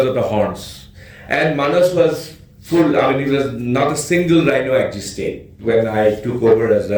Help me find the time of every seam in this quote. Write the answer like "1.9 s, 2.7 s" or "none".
none